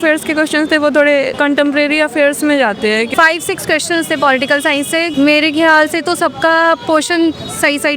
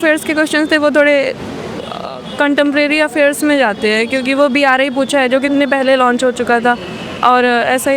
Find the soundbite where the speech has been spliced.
first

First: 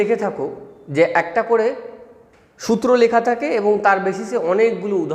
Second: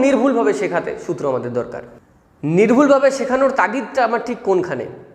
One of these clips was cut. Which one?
second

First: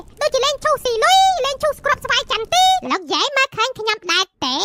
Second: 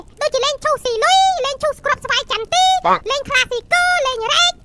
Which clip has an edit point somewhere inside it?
first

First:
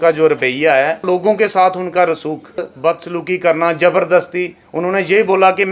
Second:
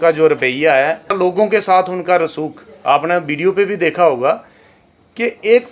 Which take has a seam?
first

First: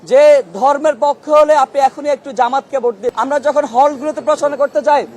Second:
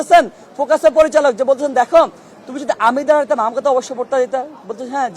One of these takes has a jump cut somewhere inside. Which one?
first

